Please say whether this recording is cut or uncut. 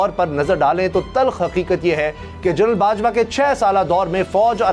uncut